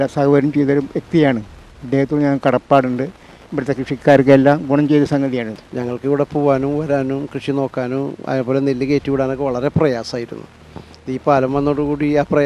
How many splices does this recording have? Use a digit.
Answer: 1